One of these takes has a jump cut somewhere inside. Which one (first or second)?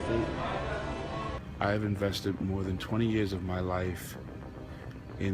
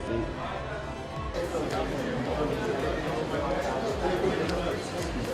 first